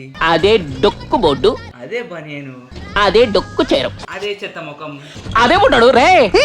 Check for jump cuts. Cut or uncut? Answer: cut